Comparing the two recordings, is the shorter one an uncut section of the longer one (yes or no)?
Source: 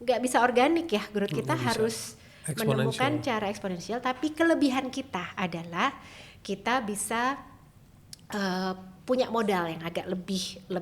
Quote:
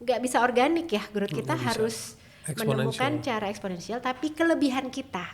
yes